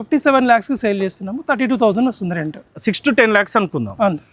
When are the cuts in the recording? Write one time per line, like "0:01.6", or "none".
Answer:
0:02.7

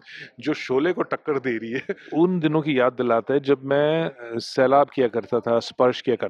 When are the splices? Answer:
0:02.0

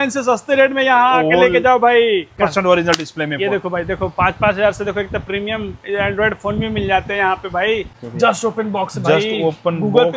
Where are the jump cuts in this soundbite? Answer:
0:02.4
0:08.0

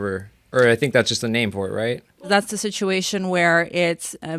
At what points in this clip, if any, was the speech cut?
0:02.1

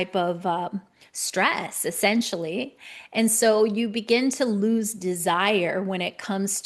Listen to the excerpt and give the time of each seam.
none

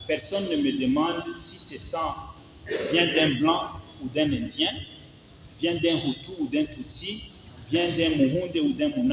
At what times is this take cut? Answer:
none

